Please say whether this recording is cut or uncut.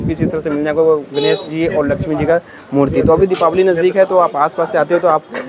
uncut